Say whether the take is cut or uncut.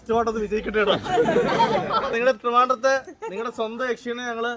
cut